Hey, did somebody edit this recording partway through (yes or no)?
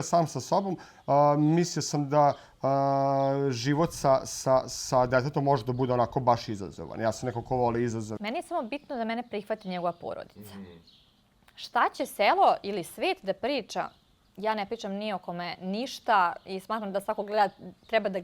yes